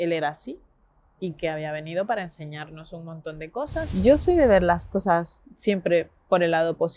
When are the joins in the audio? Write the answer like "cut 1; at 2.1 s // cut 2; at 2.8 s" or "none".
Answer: cut 1; at 3.9 s